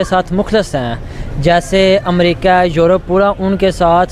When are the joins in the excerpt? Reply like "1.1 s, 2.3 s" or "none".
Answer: none